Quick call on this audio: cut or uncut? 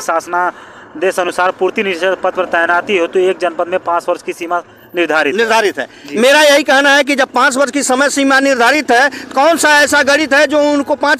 uncut